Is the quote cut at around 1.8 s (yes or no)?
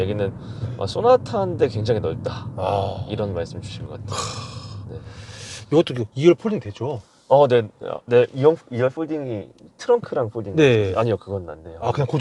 no